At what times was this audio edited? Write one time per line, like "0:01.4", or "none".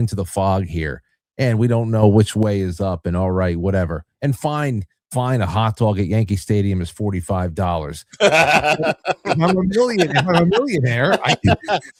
none